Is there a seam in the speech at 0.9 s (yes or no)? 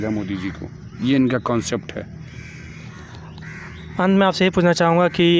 no